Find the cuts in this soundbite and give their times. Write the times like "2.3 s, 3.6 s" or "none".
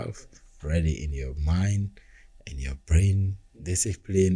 3.5 s